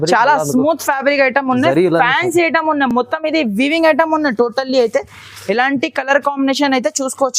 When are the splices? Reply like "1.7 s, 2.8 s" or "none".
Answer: none